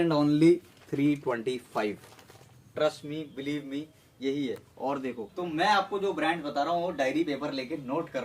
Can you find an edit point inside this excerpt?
yes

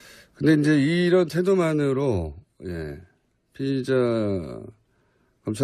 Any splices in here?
yes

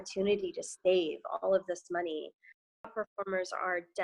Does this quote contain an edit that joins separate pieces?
yes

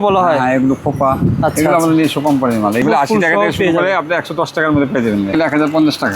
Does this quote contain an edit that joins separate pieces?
yes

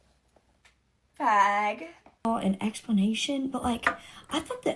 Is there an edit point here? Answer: yes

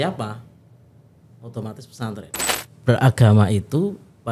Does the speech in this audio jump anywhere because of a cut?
yes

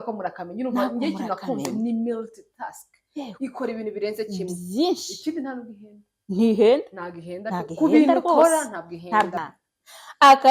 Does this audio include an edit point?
yes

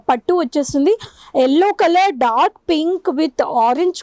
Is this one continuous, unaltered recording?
yes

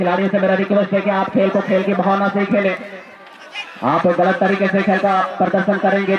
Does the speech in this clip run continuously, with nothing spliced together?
yes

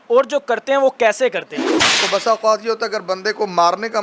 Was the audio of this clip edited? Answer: yes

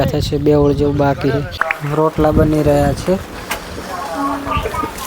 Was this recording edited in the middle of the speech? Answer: yes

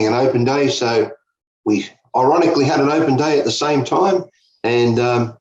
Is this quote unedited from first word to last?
no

